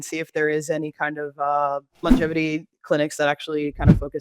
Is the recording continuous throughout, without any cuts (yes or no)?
no